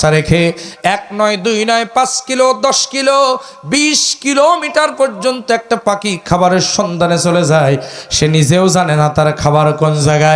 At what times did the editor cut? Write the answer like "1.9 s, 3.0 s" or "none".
none